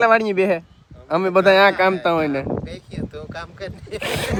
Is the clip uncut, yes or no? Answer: yes